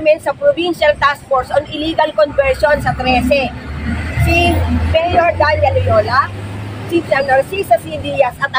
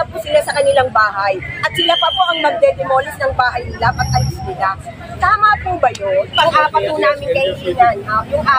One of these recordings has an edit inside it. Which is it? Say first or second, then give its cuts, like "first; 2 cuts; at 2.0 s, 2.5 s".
second; 1 cut; at 6.3 s